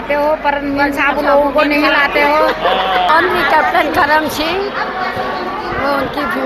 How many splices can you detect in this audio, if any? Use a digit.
1